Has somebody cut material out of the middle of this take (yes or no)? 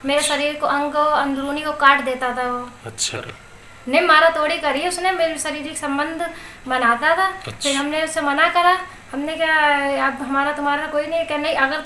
yes